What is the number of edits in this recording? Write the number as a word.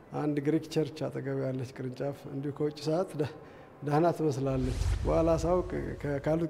one